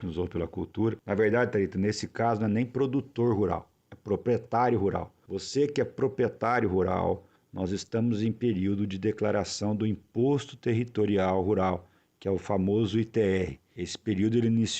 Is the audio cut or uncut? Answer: cut